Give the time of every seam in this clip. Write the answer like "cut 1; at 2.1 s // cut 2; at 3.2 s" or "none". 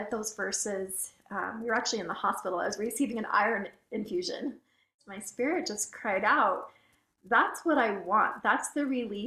cut 1; at 5.0 s